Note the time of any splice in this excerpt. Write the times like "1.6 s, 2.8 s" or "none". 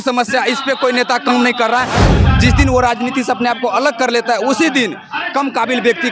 2.1 s